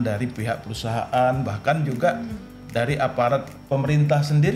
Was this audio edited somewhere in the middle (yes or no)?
no